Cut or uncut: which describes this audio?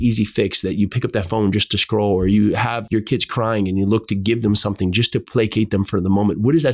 cut